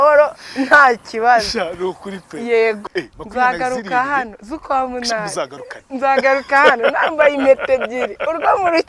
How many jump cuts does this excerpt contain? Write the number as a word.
one